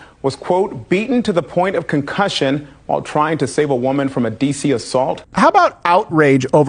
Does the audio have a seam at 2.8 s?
no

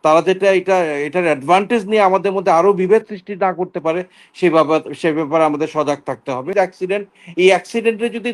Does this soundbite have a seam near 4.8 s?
no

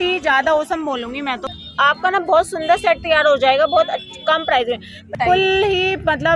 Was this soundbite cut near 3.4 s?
no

